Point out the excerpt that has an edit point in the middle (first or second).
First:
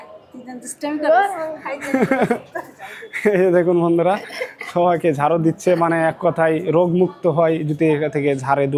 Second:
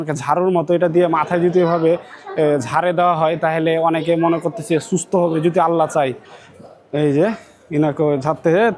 second